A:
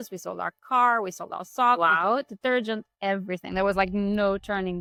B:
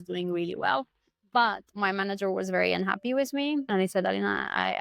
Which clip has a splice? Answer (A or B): B